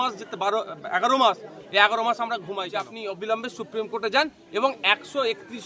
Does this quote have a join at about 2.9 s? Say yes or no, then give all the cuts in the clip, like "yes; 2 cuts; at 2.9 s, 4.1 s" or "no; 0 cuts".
yes; 1 cut; at 2.9 s